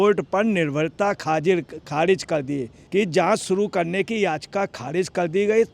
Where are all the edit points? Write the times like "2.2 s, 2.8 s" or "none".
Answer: 2.8 s